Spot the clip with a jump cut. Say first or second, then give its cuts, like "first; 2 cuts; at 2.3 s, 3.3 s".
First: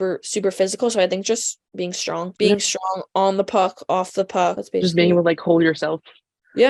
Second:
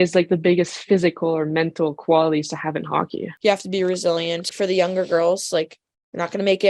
second; 2 cuts; at 3.2 s, 4.5 s